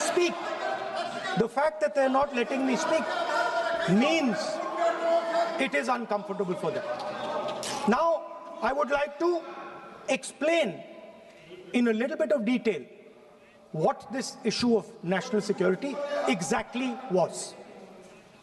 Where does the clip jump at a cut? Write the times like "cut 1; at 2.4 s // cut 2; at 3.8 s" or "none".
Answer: none